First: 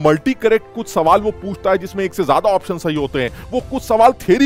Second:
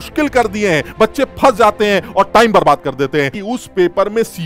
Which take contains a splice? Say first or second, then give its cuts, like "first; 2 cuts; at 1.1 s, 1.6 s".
second; 1 cut; at 3.4 s